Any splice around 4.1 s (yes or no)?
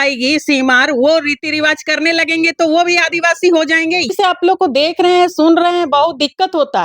yes